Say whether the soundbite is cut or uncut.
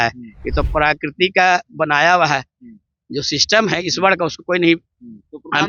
uncut